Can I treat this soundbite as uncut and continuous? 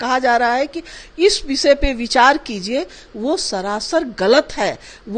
yes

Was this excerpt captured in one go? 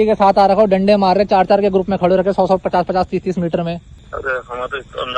no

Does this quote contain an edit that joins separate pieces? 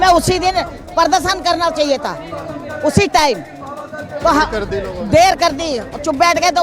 no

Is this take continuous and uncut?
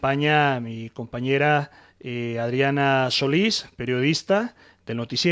no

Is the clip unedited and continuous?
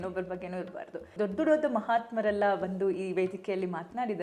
no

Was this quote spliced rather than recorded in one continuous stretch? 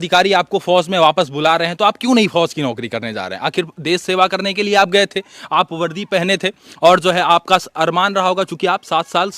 no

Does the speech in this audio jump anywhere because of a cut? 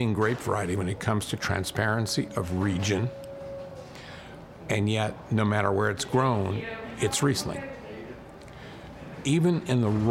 no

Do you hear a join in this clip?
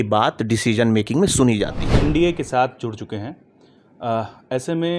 yes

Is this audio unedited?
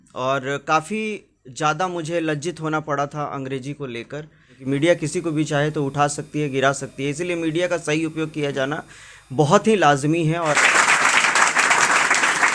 no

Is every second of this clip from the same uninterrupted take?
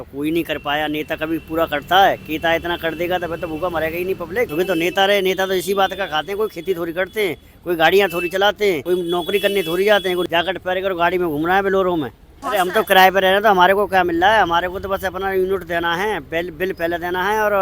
no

